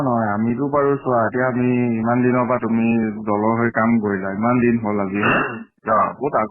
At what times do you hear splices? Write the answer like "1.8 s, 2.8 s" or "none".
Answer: 3.9 s